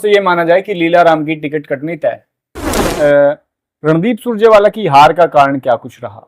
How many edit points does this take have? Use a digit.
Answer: 1